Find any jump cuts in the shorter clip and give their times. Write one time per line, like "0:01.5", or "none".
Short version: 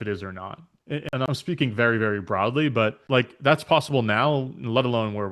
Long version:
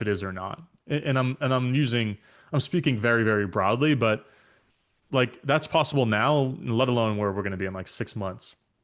0:01.0
0:03.0